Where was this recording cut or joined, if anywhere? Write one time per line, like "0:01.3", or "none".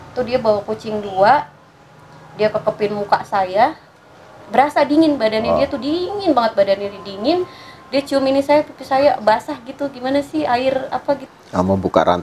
0:11.3